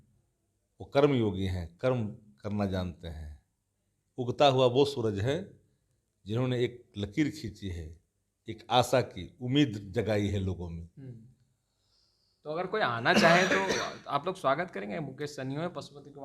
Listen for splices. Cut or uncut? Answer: uncut